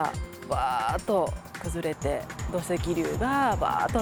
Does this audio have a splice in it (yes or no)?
no